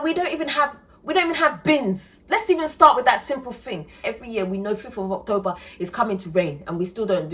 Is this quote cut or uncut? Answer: cut